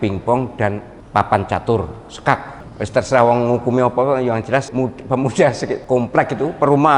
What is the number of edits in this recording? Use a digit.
4